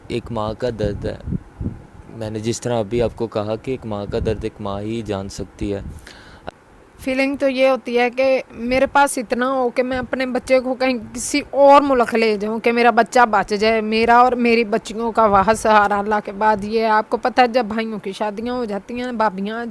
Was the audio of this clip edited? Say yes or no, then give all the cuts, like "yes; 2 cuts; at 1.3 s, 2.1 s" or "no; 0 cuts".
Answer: yes; 1 cut; at 6.5 s